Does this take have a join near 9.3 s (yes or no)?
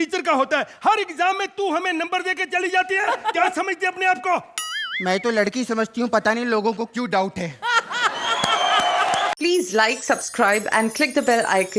yes